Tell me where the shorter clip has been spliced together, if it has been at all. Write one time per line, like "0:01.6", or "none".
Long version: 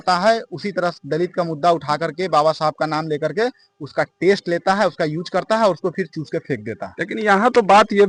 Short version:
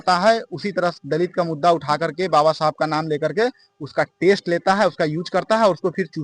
none